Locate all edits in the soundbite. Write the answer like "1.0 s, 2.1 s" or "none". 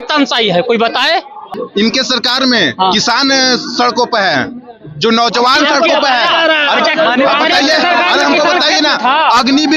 1.6 s